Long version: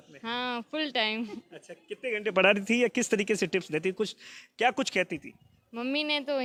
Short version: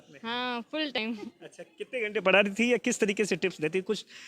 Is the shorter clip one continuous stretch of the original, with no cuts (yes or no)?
no